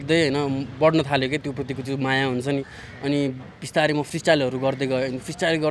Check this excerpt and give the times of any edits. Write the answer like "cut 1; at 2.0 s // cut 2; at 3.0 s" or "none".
none